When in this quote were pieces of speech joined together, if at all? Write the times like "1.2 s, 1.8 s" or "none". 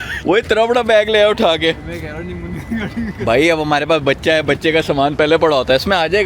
none

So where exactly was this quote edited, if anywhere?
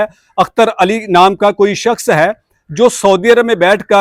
none

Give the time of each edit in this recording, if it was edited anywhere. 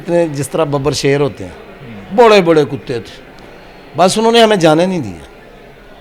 none

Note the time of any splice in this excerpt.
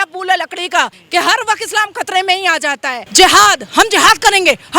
1.0 s, 3.0 s

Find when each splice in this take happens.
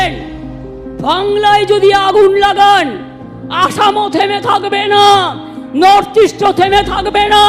none

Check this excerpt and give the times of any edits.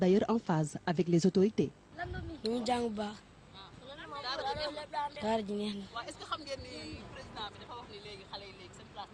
none

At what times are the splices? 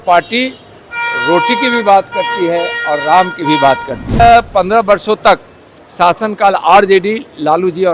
4.2 s

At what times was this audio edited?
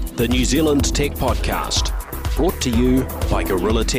none

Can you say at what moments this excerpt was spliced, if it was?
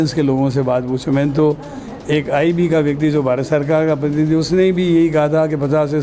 none

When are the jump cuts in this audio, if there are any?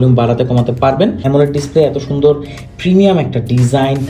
1.2 s

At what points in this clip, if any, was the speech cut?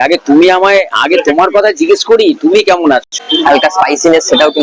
3.1 s

